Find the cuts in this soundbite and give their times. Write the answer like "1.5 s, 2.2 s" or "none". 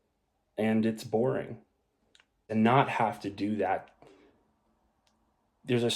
2.5 s